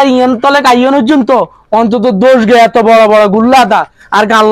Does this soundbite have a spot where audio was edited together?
no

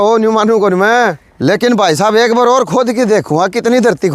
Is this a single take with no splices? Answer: no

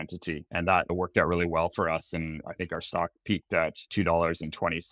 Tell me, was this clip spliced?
yes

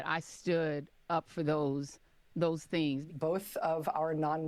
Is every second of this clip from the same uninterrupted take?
no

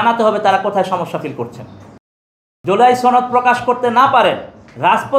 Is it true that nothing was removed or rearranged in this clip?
no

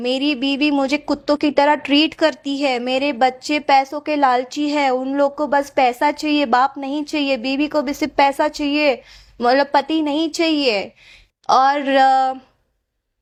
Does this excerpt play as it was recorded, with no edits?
yes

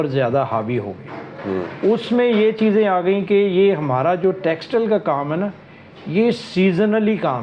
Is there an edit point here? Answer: no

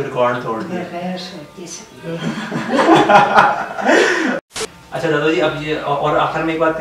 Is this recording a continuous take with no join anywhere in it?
no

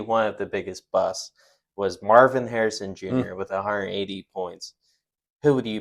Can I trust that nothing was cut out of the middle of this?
yes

